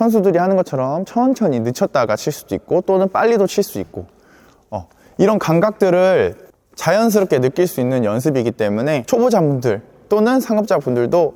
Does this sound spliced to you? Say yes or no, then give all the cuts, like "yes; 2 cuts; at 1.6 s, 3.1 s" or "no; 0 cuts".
no; 0 cuts